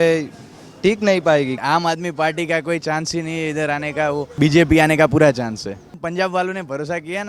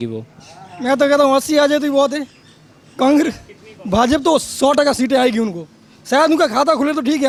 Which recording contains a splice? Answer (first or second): first